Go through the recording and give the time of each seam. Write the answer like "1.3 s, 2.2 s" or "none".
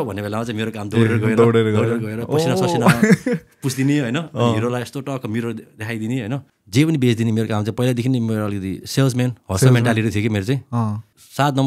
6.5 s

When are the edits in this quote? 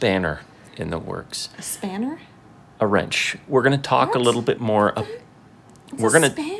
none

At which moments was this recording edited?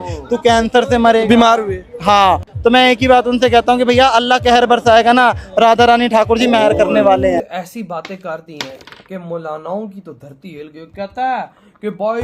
2.5 s, 7.6 s

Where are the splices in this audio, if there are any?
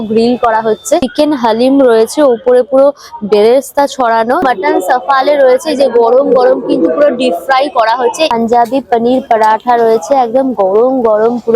1.0 s, 4.4 s, 8.3 s

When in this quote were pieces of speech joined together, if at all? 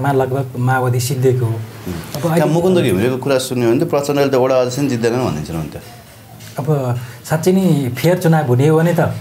none

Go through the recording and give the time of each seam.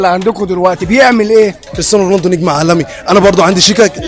1.7 s

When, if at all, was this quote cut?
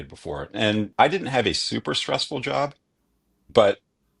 0.9 s

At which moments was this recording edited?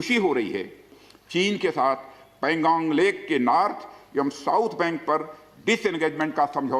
0.9 s

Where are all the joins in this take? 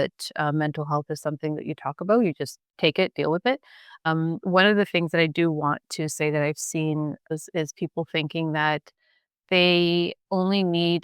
2.6 s, 4.0 s, 7.3 s, 10.2 s

